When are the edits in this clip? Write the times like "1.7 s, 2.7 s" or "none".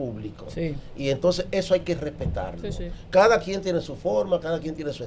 none